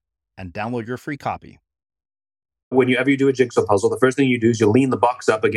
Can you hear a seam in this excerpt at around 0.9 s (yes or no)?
no